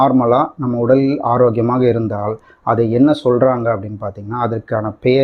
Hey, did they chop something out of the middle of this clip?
no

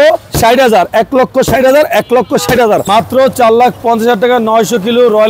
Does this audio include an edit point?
yes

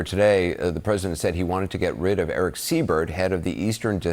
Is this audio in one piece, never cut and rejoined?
yes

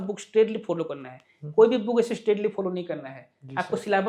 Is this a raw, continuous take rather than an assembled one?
yes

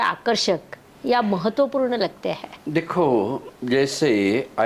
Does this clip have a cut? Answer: no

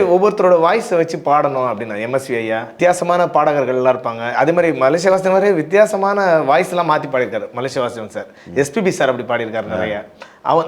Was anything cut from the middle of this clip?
yes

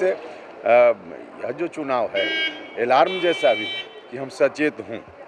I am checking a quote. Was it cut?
no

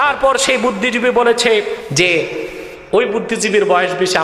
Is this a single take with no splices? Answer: no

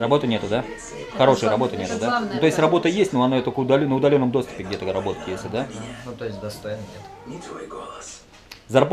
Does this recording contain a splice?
no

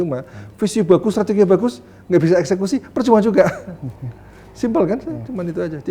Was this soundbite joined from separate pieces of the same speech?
no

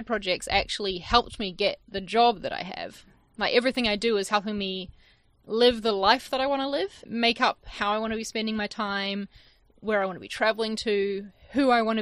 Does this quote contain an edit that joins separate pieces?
yes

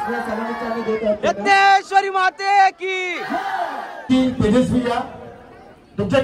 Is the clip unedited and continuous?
no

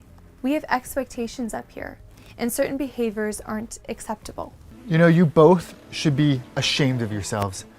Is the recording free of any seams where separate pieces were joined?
no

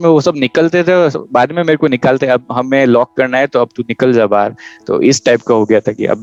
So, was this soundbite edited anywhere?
no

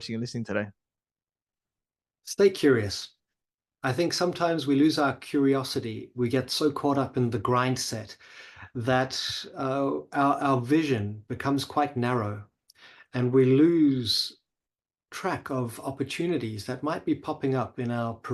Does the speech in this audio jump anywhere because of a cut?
no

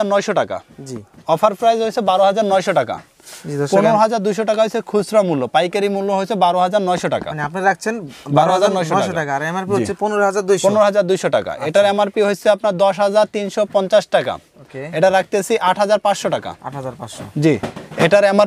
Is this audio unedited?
yes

